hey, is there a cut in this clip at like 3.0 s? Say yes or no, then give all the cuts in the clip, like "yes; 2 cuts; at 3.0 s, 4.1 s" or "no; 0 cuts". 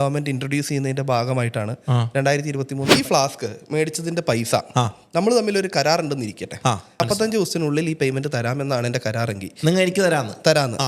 yes; 2 cuts; at 3.0 s, 7.0 s